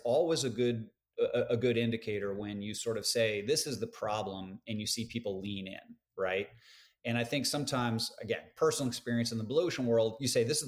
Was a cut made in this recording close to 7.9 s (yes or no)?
no